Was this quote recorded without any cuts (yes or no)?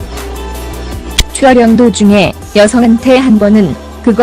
no